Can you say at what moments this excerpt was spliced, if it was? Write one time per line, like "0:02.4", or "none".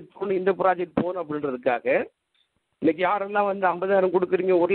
none

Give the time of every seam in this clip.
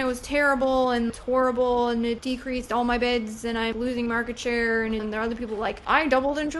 0:02.2
0:03.7
0:05.0

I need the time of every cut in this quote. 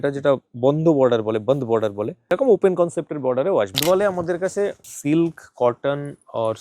0:02.3
0:03.8
0:04.9

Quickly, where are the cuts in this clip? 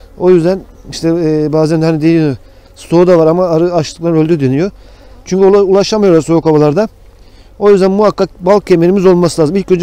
none

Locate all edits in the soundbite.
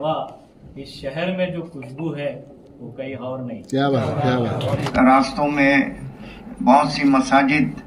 0:04.8

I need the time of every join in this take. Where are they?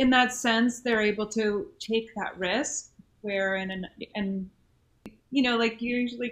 0:05.2

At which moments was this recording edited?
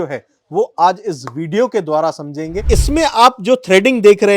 0:02.6

